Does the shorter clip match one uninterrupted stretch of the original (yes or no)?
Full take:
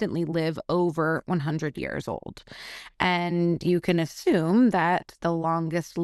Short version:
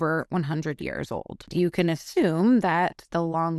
no